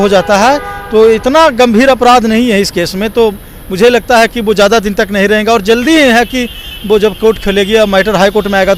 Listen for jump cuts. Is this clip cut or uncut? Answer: uncut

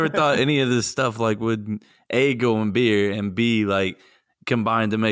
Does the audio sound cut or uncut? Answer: uncut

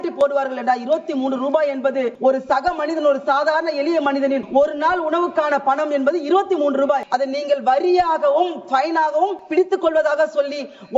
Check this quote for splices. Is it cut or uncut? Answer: cut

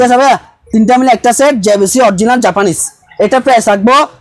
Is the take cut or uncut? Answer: uncut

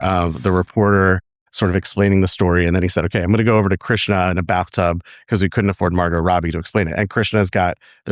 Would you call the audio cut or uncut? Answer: uncut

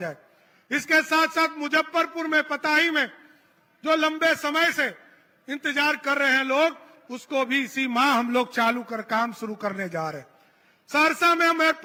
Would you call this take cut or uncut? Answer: uncut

